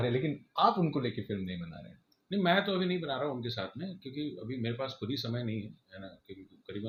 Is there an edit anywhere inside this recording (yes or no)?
no